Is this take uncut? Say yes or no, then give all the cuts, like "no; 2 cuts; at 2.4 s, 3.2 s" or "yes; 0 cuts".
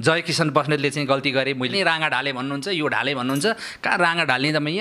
no; 1 cut; at 1.7 s